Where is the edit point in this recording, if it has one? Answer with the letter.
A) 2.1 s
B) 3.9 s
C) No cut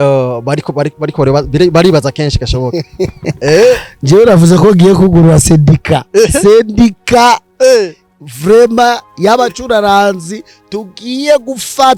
C